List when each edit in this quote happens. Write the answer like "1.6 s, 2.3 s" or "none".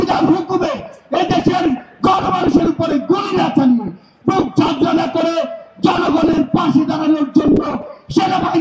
none